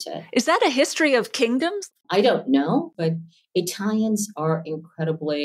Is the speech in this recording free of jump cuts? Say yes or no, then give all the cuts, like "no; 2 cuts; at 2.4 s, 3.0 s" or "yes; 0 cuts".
no; 2 cuts; at 1.8 s, 2.9 s